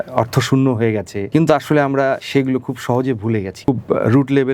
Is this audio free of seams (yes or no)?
no